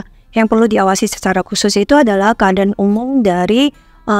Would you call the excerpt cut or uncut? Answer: uncut